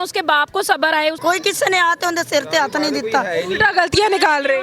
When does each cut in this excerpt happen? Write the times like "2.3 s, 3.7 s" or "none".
1.2 s